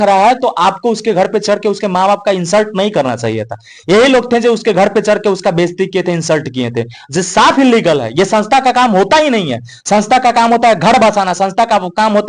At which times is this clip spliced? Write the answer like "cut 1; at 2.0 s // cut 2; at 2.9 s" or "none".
none